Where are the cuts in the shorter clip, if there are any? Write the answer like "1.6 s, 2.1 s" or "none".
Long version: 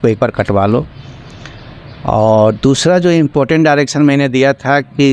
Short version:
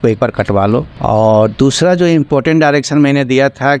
0.9 s